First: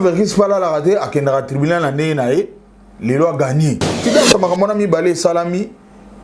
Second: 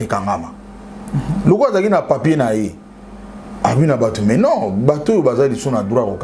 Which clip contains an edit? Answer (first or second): first